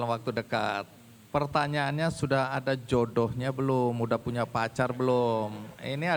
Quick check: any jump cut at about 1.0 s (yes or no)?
no